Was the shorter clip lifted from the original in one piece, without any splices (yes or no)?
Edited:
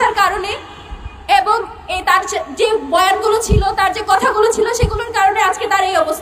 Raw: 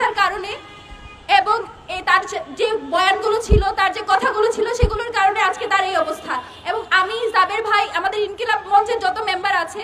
yes